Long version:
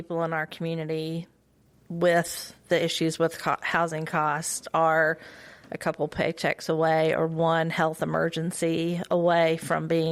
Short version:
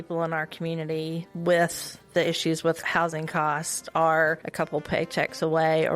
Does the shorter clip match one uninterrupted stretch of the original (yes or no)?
no